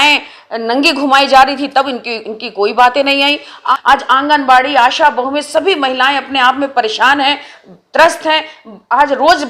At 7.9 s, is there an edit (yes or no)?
no